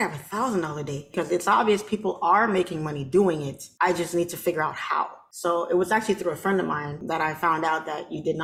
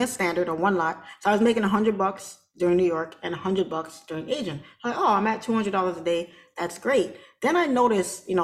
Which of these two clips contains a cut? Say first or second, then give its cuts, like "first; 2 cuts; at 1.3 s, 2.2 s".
first; 4 cuts; at 1.1 s, 3.6 s, 5.2 s, 7.0 s